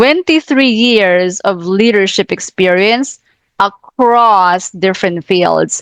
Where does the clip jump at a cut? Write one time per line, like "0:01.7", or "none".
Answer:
none